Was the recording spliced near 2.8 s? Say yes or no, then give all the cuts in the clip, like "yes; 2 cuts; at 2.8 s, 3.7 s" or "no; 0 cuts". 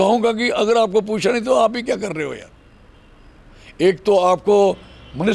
no; 0 cuts